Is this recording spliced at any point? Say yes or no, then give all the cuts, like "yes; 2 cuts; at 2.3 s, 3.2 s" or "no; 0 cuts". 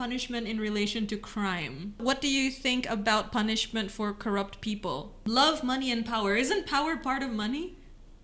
yes; 2 cuts; at 2.0 s, 5.1 s